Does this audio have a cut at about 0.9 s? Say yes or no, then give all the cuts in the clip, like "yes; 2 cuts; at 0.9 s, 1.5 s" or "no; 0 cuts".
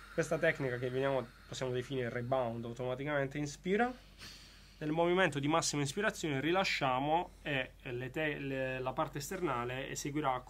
no; 0 cuts